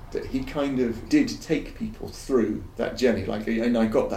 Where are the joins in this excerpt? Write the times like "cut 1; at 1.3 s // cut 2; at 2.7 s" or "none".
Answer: cut 1; at 1.0 s // cut 2; at 2.7 s